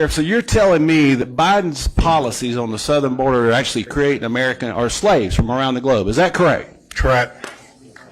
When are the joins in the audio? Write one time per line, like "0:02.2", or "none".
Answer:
0:01.2